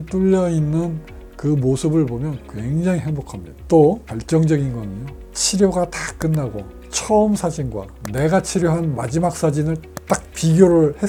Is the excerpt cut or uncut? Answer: uncut